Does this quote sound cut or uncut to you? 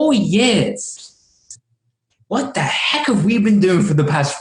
uncut